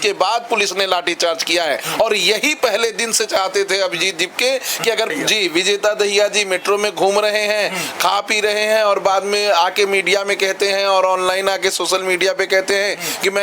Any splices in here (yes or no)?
yes